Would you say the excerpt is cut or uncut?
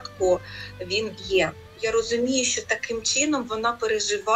cut